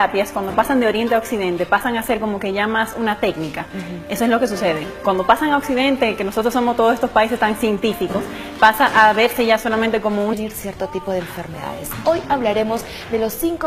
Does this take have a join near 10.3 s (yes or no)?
no